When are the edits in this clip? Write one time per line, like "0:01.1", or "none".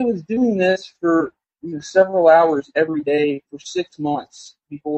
none